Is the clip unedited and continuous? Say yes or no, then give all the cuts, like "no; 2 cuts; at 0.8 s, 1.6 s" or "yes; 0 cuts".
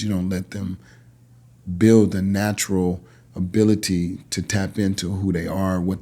yes; 0 cuts